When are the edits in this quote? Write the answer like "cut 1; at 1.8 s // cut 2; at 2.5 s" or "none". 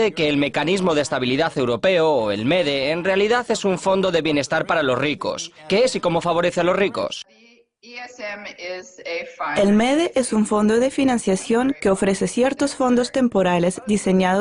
cut 1; at 11.7 s

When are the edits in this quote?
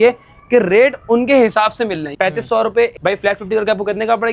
cut 1; at 2.0 s // cut 2; at 2.9 s

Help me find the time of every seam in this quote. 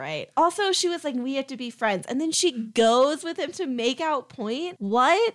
none

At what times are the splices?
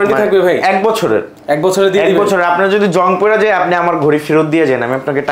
none

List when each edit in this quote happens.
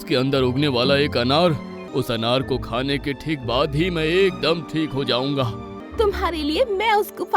cut 1; at 1.7 s // cut 2; at 5.8 s

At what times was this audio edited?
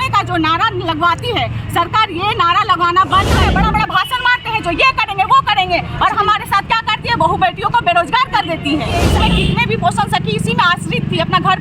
cut 1; at 3.4 s // cut 2; at 9.1 s

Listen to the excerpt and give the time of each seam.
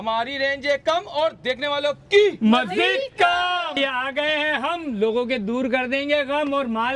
cut 1; at 3.8 s

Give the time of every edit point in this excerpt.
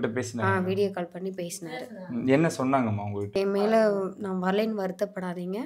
cut 1; at 3.3 s

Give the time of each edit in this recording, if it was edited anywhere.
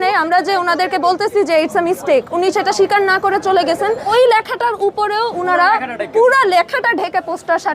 cut 1; at 4.0 s

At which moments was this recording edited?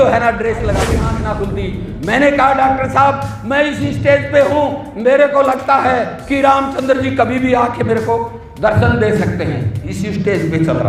cut 1; at 1.0 s

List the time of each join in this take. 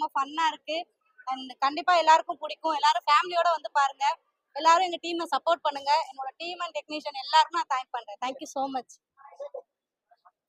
none

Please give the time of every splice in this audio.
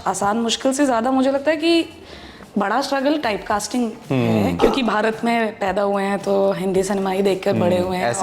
cut 1; at 4.6 s

